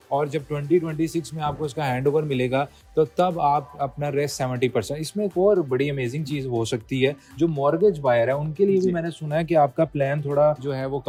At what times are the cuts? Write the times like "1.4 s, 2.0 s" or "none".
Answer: none

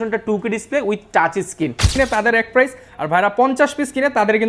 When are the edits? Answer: 1.9 s

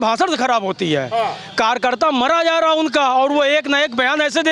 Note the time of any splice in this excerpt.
none

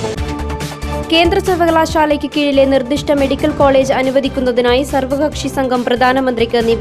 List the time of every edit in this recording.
1.0 s

